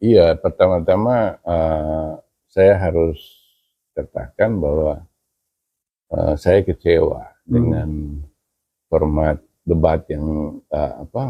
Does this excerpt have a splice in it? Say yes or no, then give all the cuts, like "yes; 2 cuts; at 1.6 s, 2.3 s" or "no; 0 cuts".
no; 0 cuts